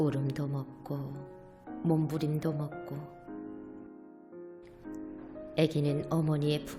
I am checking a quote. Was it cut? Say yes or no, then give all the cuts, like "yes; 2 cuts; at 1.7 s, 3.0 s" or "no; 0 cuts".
no; 0 cuts